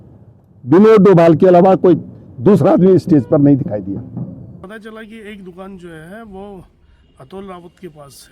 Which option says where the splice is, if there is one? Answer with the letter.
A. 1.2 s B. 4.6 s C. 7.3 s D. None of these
B